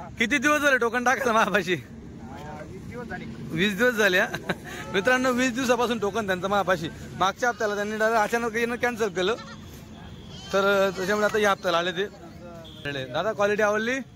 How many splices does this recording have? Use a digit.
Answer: 1